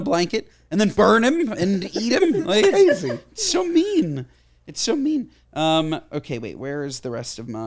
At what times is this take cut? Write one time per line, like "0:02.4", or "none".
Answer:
0:00.9